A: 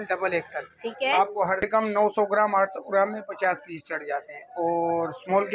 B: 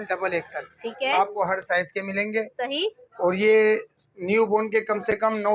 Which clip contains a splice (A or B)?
A